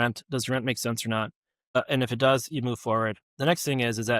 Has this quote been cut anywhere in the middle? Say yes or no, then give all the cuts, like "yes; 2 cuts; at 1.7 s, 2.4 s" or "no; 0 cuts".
yes; 2 cuts; at 1.8 s, 3.2 s